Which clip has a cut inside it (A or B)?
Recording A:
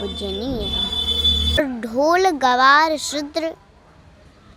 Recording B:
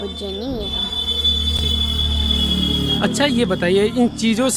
A